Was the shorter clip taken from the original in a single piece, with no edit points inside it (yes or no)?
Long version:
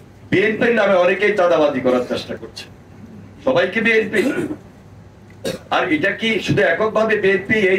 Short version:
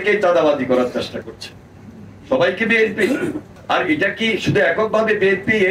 no